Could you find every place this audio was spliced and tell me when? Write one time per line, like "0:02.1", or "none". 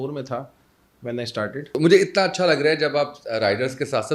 0:01.7